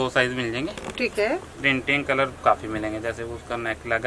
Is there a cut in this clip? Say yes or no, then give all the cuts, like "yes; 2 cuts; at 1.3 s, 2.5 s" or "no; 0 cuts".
no; 0 cuts